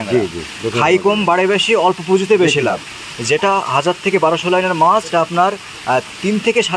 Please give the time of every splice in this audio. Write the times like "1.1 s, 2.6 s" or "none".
none